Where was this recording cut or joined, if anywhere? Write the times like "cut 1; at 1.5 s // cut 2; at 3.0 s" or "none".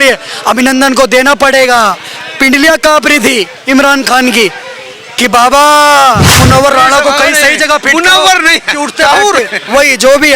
cut 1; at 6.4 s